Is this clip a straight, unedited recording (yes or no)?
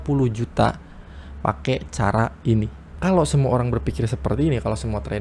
no